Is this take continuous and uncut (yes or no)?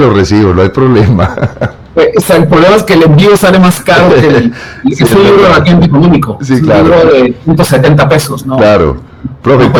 yes